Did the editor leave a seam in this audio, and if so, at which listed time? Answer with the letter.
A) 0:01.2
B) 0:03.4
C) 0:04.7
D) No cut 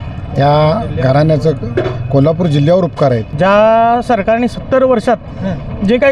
B